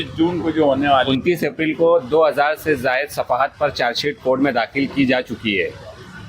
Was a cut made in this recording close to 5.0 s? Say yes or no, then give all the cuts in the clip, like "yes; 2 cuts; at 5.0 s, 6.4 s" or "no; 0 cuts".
no; 1 cut; at 1.1 s